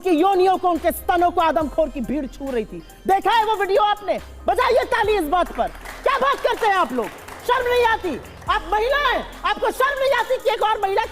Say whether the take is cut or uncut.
uncut